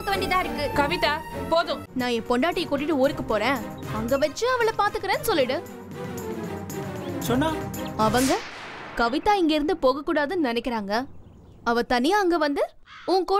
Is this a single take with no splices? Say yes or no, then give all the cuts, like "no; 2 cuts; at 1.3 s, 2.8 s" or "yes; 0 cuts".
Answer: no; 1 cut; at 1.9 s